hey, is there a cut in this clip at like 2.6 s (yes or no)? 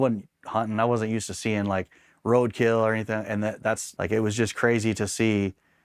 no